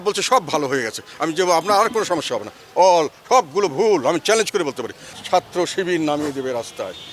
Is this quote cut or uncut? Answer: cut